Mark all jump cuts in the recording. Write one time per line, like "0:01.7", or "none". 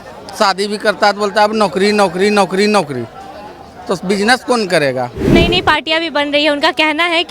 0:05.3